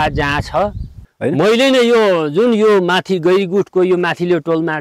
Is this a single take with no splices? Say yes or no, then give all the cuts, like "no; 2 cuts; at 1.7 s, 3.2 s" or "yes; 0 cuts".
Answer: no; 1 cut; at 1.0 s